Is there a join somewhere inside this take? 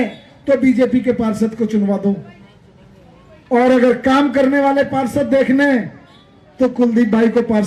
no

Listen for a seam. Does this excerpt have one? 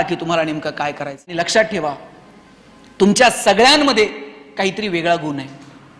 yes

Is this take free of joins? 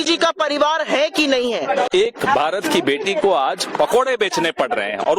no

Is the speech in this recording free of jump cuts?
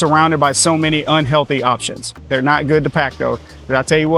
no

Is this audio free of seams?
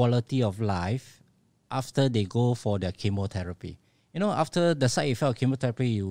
yes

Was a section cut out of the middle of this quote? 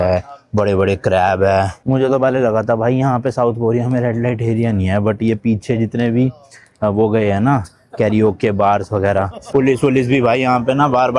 yes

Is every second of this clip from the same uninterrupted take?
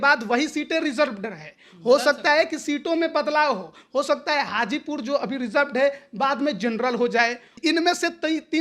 no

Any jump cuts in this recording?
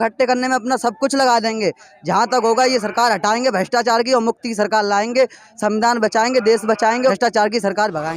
yes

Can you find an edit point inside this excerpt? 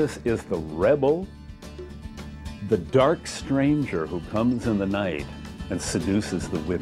no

